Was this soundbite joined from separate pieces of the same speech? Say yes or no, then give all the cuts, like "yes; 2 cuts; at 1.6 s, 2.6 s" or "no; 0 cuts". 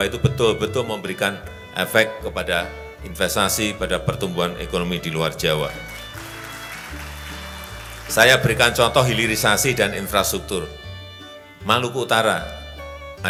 no; 0 cuts